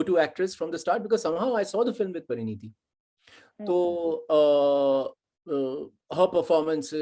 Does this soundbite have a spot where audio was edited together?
no; 0 cuts

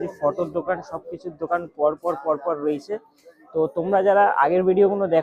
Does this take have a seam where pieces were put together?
no; 0 cuts

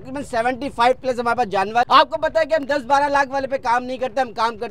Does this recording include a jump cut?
yes; 1 cut; at 1.9 s

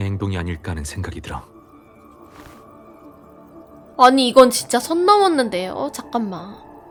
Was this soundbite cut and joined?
no; 0 cuts

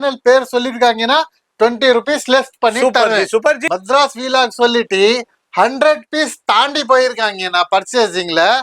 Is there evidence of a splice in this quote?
yes; 1 cut; at 3.6 s

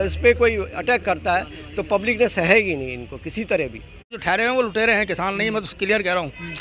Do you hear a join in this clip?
yes; 1 cut; at 4.2 s

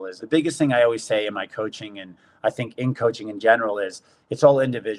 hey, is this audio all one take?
yes; 0 cuts

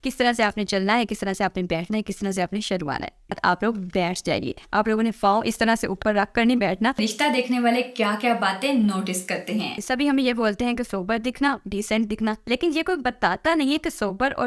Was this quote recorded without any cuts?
no; 3 cuts; at 3.4 s, 7.0 s, 9.8 s

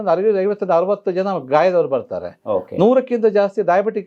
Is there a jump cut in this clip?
no; 0 cuts

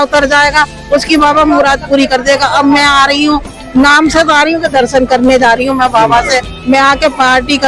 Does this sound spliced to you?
no; 0 cuts

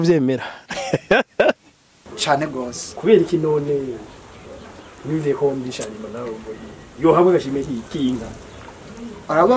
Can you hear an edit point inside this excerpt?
yes; 1 cut; at 2.0 s

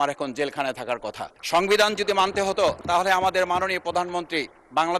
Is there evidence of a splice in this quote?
yes; 2 cuts; at 1.3 s, 2.8 s

